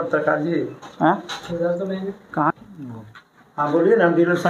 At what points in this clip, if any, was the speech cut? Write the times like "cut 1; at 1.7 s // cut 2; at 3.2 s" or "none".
none